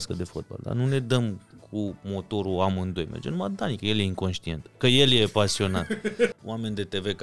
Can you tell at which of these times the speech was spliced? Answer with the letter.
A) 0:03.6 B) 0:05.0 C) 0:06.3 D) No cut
C